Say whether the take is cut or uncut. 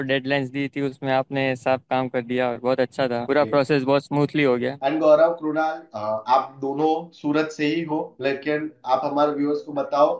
cut